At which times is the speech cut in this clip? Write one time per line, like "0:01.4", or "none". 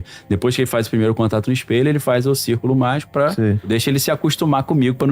0:03.7